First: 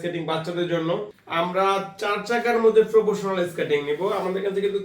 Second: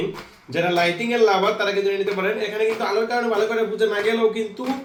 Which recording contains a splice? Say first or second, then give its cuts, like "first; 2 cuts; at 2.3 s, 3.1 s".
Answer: first; 1 cut; at 1.2 s